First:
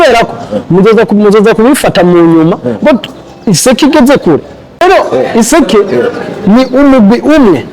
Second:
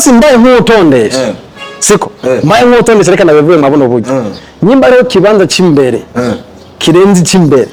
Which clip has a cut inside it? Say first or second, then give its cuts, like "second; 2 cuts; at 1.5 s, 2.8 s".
first; 1 cut; at 4.8 s